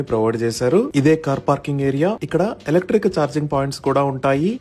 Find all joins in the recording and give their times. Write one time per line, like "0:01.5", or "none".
none